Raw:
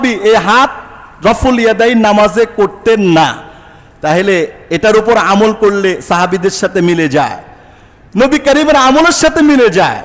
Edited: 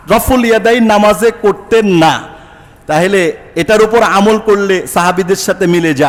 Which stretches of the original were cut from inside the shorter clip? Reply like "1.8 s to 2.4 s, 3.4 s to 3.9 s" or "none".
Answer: none